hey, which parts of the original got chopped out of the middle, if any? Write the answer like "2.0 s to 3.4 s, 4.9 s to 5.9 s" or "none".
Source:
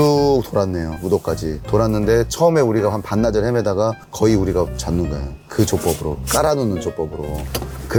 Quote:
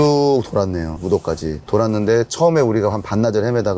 none